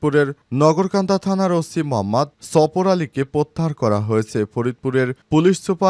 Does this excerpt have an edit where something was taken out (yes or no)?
no